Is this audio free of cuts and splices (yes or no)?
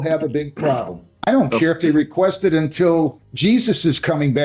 no